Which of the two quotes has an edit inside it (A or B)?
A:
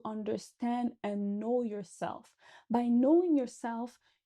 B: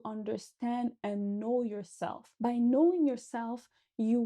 B